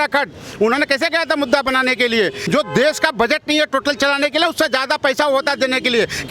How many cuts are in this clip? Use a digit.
1